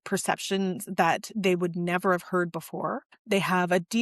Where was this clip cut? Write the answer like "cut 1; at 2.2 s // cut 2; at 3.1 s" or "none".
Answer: cut 1; at 3.1 s